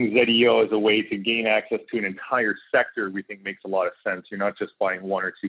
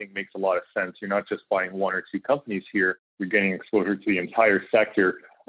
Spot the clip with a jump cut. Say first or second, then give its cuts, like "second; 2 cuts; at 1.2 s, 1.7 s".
second; 2 cuts; at 3.1 s, 4.3 s